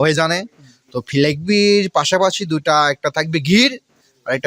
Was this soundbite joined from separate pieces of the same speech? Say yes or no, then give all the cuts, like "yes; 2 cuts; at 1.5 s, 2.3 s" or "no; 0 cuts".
no; 0 cuts